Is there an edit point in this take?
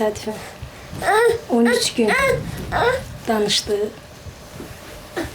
no; 0 cuts

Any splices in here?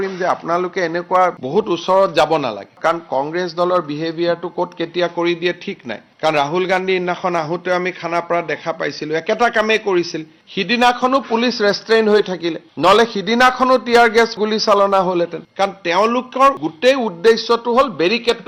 no; 0 cuts

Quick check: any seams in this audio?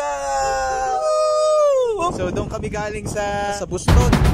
yes; 3 cuts; at 1.0 s, 2.2 s, 3.6 s

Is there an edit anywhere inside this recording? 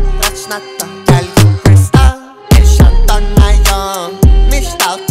yes; 1 cut; at 1.0 s

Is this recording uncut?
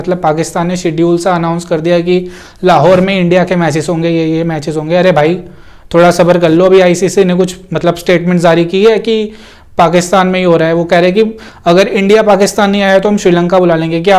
yes; 0 cuts

